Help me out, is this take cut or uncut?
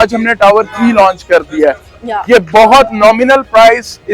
cut